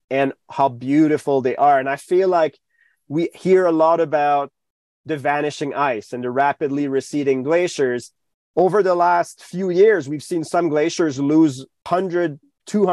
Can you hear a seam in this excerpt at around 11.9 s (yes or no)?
yes